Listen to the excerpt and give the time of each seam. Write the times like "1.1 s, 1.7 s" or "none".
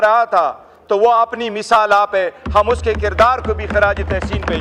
none